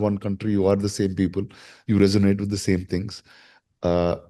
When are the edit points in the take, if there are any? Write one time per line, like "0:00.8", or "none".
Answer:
none